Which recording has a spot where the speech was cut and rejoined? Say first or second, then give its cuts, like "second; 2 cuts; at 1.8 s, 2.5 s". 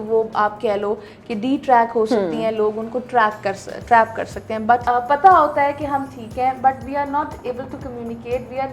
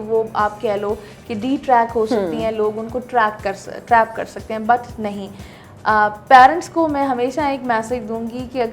first; 1 cut; at 4.8 s